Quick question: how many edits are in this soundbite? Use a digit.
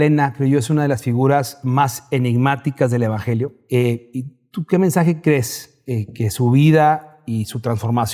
1